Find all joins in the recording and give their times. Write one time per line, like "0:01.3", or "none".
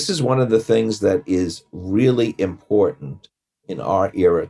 none